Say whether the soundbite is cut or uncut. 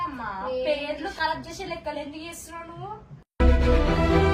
uncut